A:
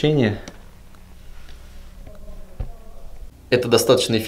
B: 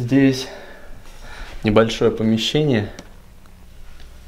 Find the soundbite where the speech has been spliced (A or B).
A